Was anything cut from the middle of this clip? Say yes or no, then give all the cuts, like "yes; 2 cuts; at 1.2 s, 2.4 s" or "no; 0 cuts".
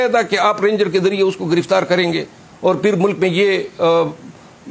no; 0 cuts